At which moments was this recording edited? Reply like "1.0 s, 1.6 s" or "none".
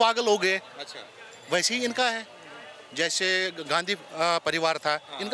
none